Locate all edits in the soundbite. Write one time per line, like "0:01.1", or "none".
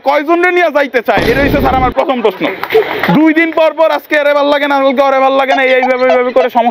none